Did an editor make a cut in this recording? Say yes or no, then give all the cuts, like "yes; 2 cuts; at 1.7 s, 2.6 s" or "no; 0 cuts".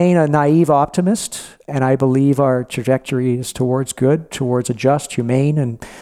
yes; 1 cut; at 1.6 s